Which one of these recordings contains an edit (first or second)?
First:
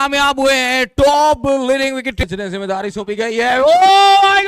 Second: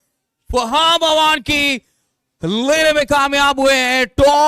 first